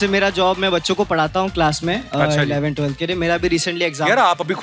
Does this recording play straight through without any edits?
yes; 0 cuts

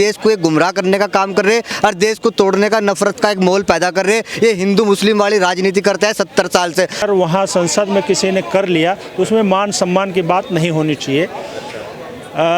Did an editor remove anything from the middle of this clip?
yes; 1 cut; at 7.0 s

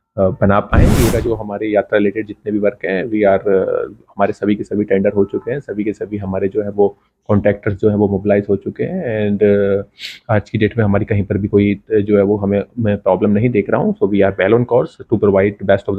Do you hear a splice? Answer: yes; 1 cut; at 1.1 s

